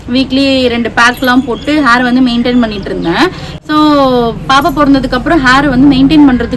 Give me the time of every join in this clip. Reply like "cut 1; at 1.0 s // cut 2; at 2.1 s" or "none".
none